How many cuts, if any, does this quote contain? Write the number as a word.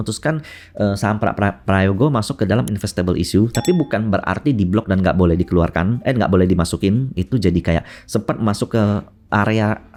zero